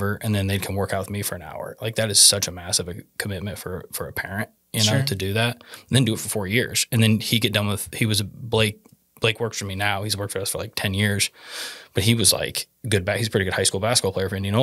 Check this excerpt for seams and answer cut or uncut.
uncut